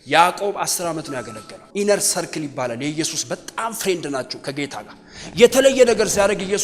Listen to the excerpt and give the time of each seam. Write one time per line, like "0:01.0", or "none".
0:01.5